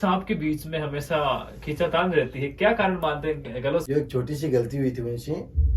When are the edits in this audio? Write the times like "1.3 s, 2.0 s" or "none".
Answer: 3.8 s